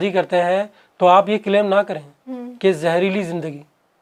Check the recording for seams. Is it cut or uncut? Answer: uncut